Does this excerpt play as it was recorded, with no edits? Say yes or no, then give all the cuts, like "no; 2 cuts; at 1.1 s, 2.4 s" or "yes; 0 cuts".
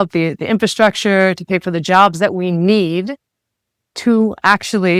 yes; 0 cuts